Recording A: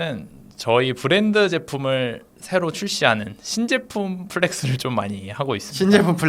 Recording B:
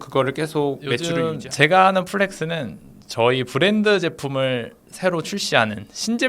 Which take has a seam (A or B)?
B